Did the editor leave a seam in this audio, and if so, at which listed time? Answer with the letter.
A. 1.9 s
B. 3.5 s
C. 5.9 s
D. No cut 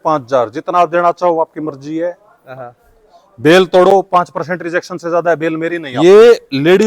C